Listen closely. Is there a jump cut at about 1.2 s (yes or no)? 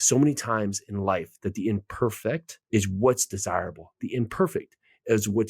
no